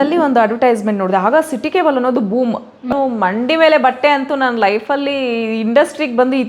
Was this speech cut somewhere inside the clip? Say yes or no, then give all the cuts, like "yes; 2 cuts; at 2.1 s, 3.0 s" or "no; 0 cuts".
yes; 1 cut; at 2.9 s